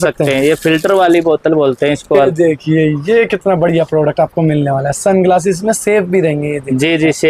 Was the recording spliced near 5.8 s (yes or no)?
no